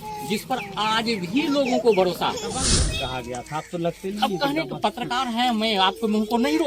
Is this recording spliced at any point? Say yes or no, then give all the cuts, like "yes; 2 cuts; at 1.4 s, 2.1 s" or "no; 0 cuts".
yes; 1 cut; at 2.8 s